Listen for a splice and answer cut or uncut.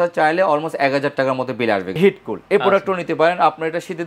cut